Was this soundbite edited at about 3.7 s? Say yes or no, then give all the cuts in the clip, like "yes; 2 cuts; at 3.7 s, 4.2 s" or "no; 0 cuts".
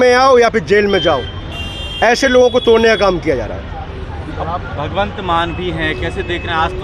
no; 0 cuts